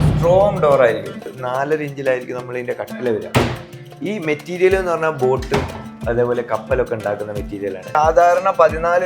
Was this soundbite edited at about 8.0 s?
yes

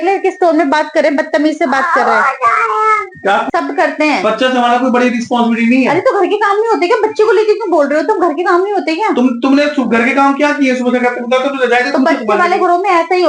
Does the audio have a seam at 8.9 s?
no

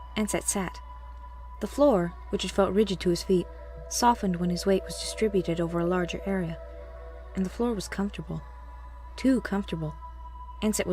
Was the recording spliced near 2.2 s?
no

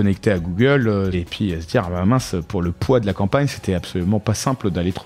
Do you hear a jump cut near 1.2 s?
yes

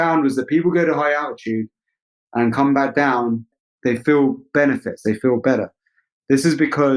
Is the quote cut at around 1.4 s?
no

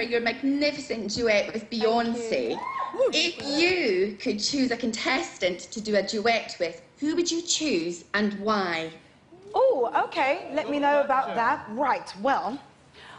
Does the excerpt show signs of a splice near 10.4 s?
no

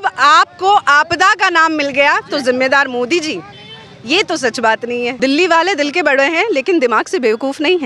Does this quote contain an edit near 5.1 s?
yes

